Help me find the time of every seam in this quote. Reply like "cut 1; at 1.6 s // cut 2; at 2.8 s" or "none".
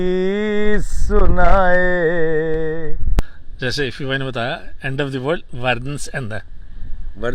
cut 1; at 3.0 s